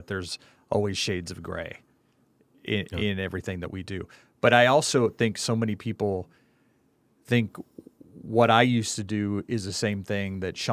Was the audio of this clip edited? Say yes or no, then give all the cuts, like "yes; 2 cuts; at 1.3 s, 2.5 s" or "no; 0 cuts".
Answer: no; 0 cuts